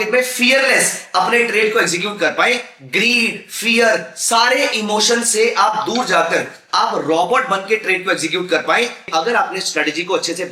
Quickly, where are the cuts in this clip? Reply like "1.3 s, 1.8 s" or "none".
9.1 s